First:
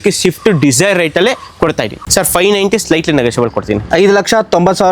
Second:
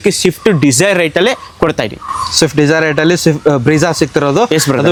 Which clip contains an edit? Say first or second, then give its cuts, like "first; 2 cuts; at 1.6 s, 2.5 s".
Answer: first; 1 cut; at 1.9 s